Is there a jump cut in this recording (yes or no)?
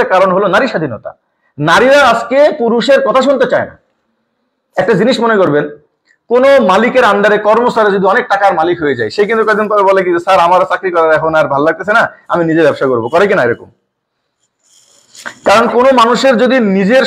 no